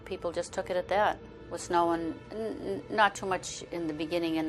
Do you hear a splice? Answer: yes; 1 cut; at 2.7 s

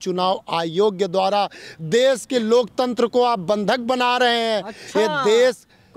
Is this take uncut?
yes; 0 cuts

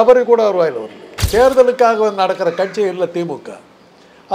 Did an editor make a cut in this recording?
yes; 1 cut; at 1.3 s

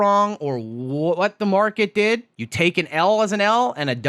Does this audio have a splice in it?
yes; 1 cut; at 2.4 s

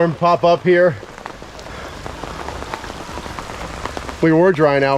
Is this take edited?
no; 0 cuts

